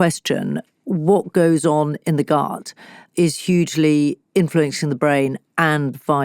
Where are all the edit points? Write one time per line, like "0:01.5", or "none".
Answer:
0:03.1

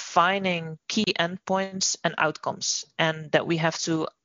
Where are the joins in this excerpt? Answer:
none

